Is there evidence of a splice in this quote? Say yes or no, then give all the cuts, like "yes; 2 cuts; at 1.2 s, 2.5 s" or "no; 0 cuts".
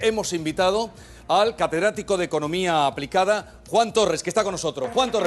no; 0 cuts